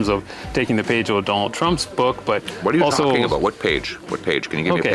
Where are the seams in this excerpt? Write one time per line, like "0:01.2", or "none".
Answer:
0:03.9